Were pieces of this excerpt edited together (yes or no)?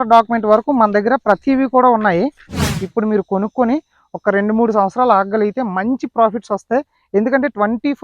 yes